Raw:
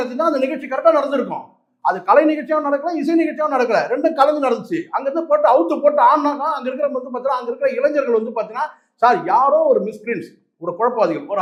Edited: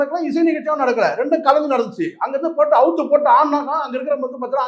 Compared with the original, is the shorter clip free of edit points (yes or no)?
yes